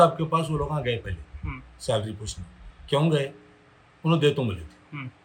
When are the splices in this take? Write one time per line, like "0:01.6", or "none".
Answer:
none